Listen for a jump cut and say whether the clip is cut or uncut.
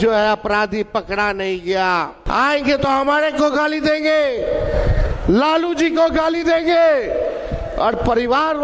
cut